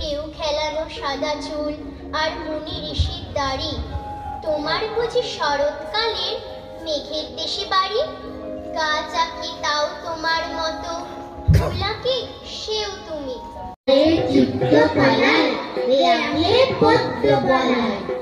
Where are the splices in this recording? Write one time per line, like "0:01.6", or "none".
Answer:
none